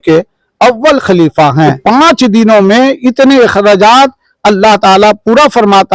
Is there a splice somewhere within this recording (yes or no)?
yes